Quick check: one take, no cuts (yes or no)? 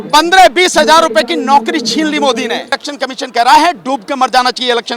no